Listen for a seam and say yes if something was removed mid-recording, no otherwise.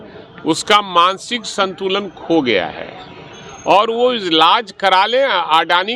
no